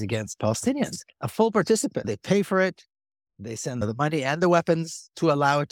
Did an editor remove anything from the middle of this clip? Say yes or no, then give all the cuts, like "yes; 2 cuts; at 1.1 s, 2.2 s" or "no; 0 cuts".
no; 0 cuts